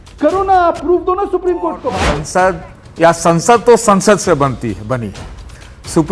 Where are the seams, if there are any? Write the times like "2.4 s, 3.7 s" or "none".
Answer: 2.2 s